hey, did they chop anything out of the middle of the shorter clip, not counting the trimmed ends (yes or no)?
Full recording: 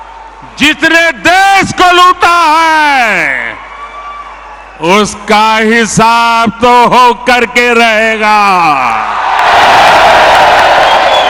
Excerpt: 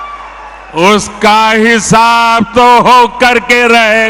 no